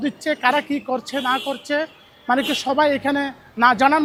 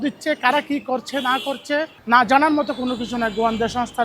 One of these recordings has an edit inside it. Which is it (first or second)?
second